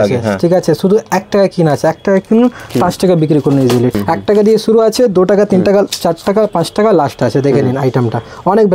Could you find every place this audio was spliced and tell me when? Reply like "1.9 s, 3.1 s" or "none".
4.0 s